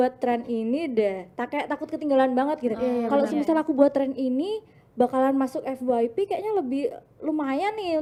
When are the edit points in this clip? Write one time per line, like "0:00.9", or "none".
none